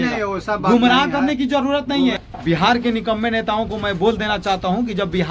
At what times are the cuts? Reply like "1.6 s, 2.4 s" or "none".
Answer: 2.3 s

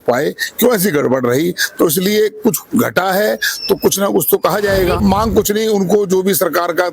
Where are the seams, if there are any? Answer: 5.0 s

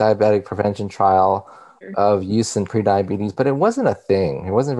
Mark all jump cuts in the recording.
1.8 s

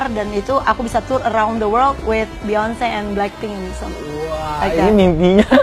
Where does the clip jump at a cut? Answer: none

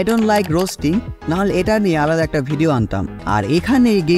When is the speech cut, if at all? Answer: 3.2 s

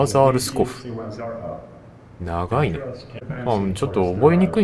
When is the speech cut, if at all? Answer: 3.2 s

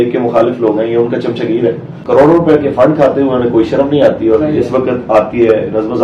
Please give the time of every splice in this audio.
2.0 s

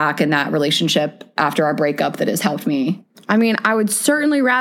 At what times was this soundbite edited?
3.1 s

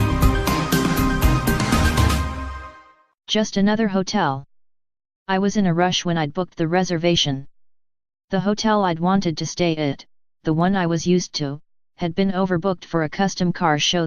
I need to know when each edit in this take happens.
10.6 s

